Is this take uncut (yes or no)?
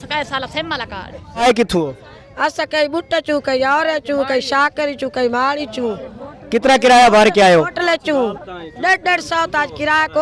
no